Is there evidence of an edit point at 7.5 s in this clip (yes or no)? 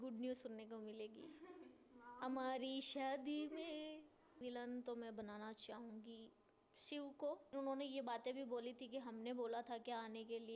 yes